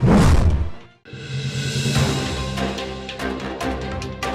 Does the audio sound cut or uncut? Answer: cut